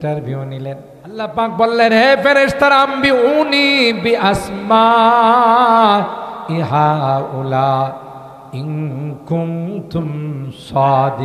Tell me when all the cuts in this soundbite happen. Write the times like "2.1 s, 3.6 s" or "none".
1.3 s

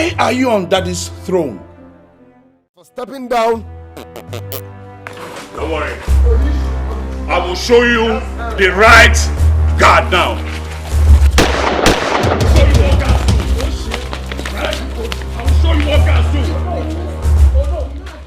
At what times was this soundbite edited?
3.1 s

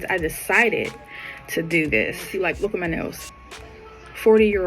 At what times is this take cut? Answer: 2.2 s

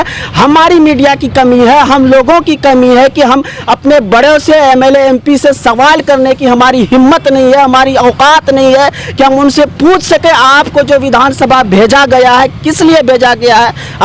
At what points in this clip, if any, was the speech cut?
none

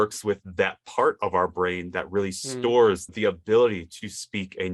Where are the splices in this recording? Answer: none

